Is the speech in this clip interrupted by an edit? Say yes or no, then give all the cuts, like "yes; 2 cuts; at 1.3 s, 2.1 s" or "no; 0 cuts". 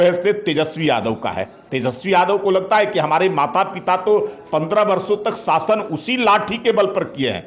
yes; 1 cut; at 1.6 s